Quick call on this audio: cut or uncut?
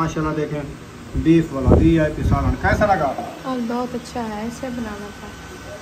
uncut